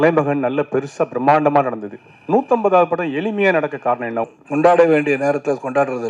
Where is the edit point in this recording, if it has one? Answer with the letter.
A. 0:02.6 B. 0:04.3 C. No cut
B